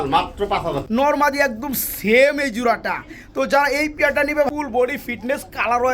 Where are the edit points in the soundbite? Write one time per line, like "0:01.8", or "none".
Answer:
0:00.8
0:04.5